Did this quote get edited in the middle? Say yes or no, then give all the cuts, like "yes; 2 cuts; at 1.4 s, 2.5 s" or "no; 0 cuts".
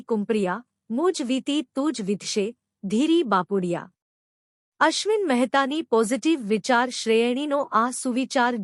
no; 0 cuts